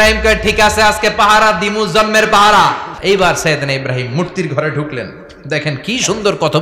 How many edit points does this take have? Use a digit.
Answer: 1